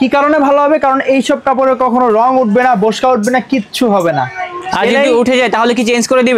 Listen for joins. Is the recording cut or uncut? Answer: uncut